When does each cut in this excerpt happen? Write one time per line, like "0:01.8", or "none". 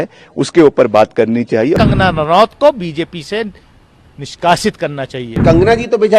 0:01.8
0:05.4